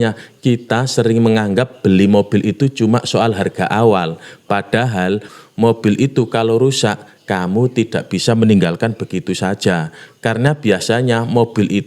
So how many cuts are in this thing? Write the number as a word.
one